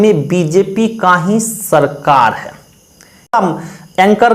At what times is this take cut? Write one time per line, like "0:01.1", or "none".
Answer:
0:03.3